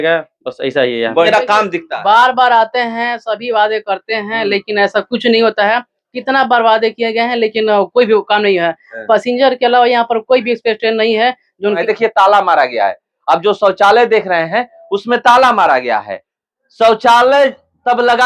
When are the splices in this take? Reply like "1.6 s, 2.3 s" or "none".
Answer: 1.3 s, 11.8 s